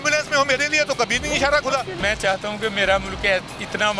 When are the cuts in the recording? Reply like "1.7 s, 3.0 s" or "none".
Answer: 2.0 s